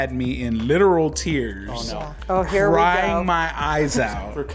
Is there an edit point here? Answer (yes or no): no